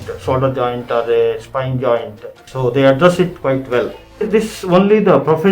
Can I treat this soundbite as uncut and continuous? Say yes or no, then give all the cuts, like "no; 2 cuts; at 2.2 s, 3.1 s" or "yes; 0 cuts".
no; 2 cuts; at 2.5 s, 4.2 s